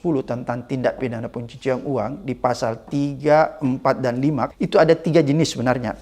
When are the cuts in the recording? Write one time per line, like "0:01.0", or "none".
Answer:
0:04.5